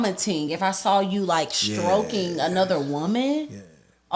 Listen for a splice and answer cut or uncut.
uncut